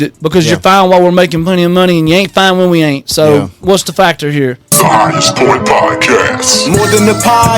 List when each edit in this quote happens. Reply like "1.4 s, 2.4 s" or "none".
4.6 s